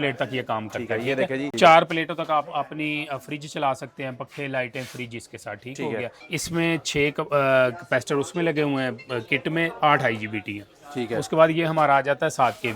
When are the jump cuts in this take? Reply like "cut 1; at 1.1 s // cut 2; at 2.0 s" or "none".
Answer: cut 1; at 1.5 s // cut 2; at 6.2 s